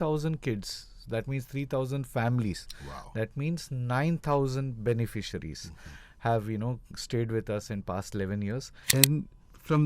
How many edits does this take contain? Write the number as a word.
one